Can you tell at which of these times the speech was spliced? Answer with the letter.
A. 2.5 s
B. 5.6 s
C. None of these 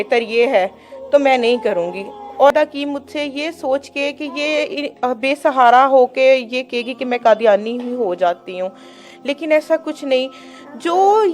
A